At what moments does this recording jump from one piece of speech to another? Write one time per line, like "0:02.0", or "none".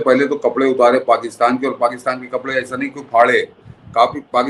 none